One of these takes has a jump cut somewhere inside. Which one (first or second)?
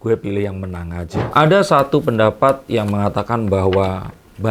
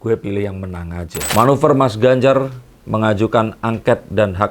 second